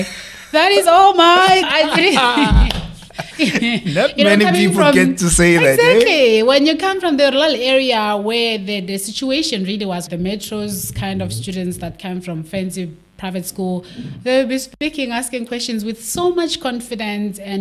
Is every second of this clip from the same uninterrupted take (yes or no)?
no